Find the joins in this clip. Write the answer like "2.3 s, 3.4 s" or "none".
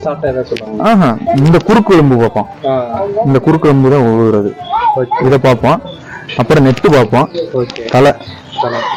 none